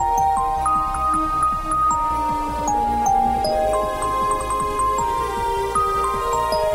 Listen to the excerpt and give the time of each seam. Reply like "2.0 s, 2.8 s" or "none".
none